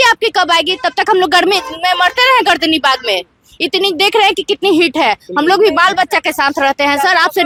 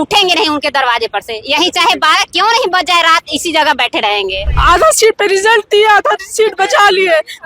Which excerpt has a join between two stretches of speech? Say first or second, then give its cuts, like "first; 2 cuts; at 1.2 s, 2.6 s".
second; 1 cut; at 4.5 s